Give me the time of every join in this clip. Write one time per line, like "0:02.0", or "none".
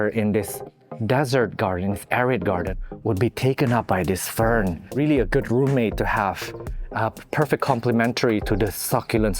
0:04.8